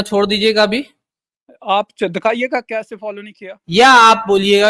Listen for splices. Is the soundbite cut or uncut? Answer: cut